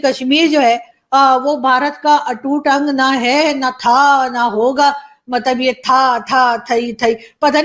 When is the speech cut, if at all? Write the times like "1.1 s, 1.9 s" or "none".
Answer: none